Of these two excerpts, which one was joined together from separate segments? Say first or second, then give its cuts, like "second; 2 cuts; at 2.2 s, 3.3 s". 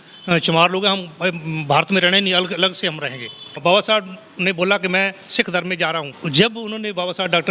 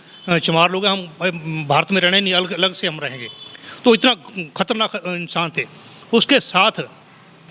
first; 2 cuts; at 3.6 s, 6.2 s